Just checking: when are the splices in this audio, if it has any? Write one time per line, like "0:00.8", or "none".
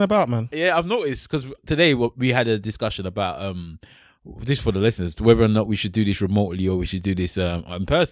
0:01.6